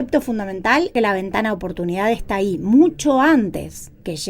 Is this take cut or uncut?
cut